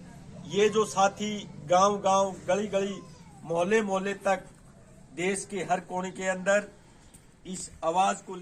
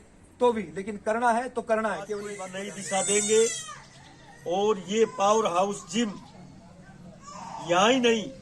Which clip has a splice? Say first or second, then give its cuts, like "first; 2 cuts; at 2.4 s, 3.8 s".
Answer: second; 1 cut; at 2.5 s